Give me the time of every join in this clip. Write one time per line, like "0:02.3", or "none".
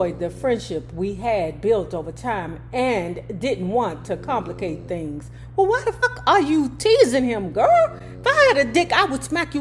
none